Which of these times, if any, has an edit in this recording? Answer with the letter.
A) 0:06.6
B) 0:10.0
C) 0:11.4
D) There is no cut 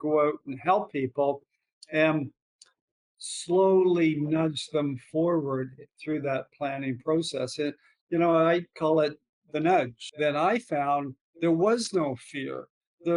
B